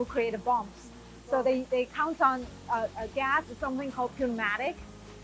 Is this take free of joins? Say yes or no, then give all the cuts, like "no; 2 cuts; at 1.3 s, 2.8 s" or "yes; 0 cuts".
yes; 0 cuts